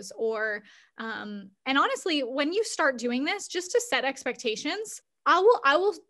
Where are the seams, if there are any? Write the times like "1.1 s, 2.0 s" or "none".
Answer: 5.0 s